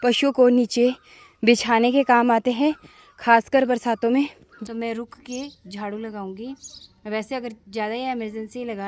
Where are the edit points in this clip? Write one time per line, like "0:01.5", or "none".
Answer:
0:04.5